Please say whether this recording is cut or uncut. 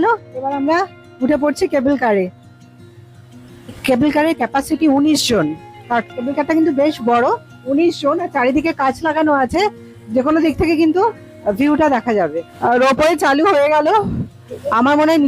uncut